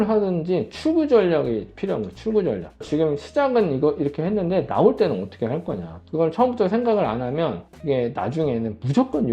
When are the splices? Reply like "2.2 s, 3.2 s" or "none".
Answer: 2.8 s